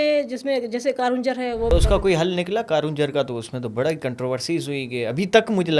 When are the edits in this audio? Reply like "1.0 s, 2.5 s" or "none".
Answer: 1.7 s